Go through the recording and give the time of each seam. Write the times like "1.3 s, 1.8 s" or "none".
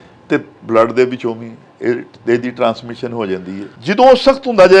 3.7 s